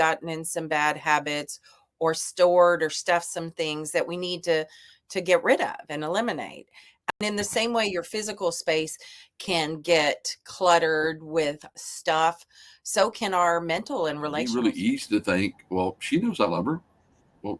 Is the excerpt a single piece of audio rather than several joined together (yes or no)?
no